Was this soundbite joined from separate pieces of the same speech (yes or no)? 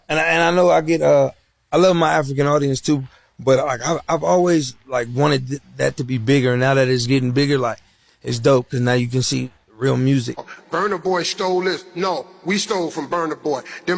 yes